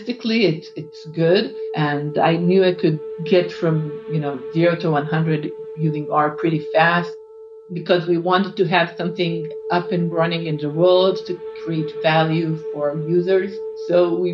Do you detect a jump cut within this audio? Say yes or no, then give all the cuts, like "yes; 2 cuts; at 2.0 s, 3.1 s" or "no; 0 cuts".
yes; 1 cut; at 7.7 s